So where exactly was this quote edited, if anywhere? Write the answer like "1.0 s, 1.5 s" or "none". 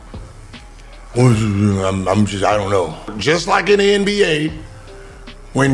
3.1 s